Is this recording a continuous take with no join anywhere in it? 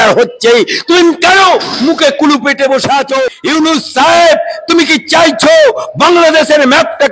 no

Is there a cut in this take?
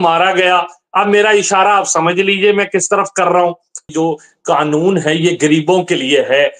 yes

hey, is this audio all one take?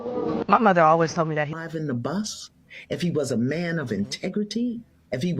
no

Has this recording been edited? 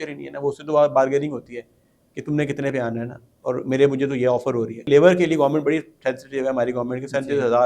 yes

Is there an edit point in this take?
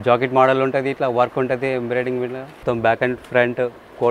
yes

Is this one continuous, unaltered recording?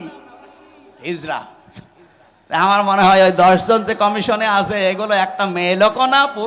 yes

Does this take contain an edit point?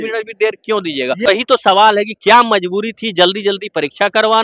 yes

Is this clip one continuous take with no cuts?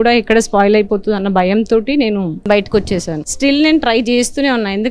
no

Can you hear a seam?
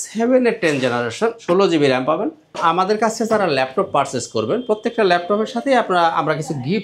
yes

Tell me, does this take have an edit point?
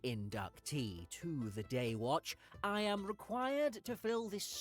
no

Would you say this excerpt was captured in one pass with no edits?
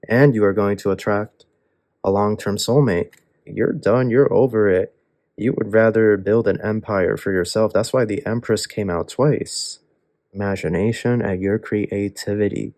no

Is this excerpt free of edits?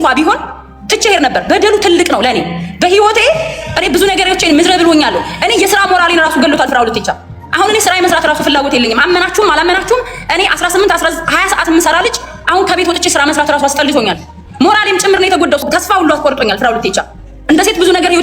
no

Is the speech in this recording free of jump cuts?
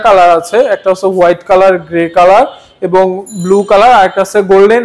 yes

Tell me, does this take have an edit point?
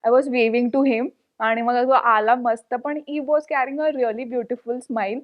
no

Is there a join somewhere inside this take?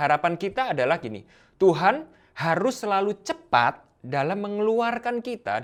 no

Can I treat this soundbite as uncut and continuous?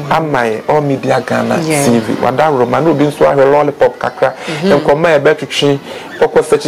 yes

